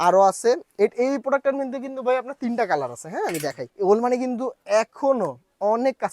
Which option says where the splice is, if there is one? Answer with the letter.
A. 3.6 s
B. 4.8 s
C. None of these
A